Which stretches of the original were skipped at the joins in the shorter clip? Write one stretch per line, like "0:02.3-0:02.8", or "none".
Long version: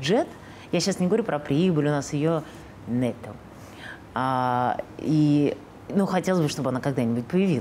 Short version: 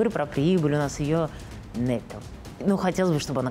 0:03.6-0:05.7